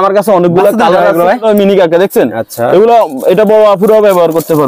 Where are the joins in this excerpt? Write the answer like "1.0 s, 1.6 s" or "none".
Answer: 1.4 s